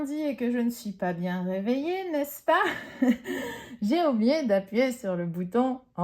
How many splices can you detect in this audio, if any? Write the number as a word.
zero